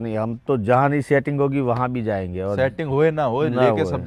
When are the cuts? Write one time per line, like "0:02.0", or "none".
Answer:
none